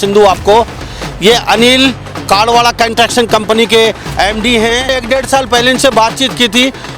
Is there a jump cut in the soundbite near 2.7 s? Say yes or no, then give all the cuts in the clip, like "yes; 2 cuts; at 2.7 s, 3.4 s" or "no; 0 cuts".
no; 1 cut; at 4.9 s